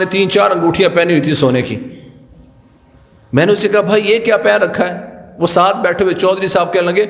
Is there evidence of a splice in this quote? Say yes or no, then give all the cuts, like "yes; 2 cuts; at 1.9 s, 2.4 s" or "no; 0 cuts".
no; 0 cuts